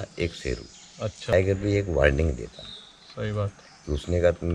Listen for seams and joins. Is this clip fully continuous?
no; 1 cut; at 1.3 s

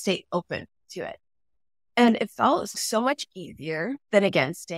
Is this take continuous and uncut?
no; 1 cut; at 2.8 s

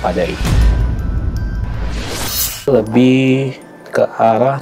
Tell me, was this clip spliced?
yes; 1 cut; at 2.7 s

